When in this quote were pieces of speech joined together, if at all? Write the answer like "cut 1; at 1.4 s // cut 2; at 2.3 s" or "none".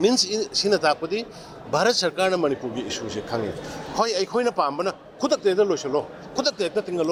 none